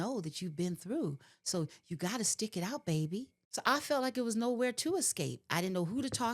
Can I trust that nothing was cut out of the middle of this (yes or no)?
no